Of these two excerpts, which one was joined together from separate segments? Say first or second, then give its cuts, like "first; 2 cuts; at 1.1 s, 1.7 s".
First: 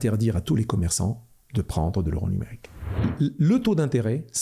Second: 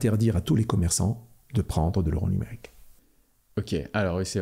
first; 1 cut; at 2.8 s